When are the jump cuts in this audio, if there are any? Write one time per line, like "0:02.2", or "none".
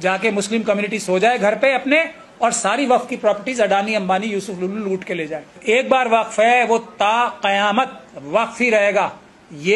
0:05.5